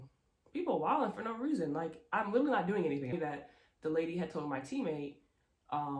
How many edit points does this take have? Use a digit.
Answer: 1